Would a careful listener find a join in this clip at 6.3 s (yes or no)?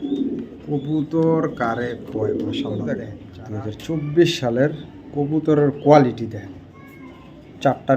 no